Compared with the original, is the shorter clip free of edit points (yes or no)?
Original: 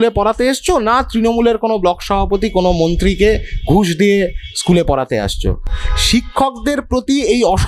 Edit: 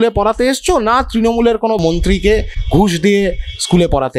no